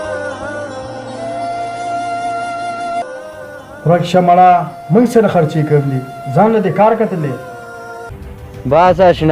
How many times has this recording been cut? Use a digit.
1